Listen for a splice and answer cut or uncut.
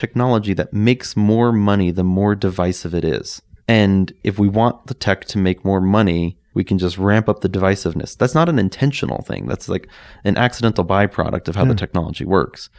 uncut